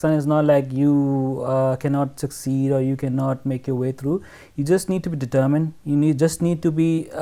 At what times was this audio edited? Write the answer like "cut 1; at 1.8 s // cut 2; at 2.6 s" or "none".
none